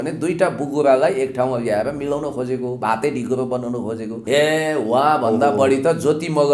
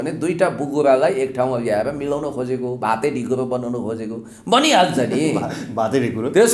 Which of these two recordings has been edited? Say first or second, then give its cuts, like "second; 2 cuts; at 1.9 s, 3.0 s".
first; 1 cut; at 4.1 s